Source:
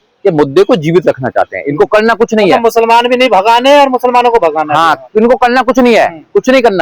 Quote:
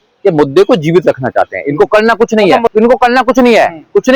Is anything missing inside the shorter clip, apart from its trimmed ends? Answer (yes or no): yes